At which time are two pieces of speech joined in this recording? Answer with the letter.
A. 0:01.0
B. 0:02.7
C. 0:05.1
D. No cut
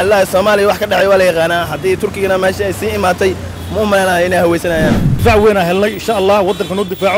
C